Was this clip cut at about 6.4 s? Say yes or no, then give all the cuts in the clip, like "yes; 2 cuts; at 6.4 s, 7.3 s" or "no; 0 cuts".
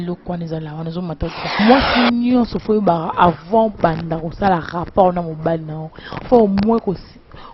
no; 1 cut; at 1.6 s